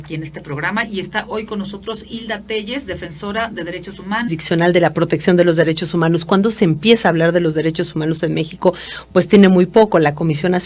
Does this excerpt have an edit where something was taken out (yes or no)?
no